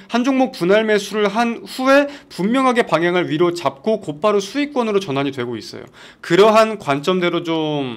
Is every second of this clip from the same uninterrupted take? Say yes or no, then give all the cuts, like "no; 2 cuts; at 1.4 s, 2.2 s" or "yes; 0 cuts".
no; 1 cut; at 6.1 s